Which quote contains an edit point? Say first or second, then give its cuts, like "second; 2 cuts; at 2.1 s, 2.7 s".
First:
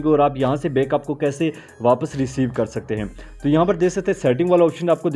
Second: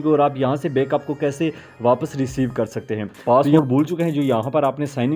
second; 1 cut; at 3.3 s